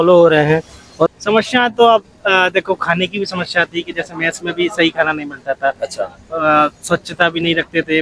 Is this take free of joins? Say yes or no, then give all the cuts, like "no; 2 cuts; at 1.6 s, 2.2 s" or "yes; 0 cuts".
no; 1 cut; at 1.1 s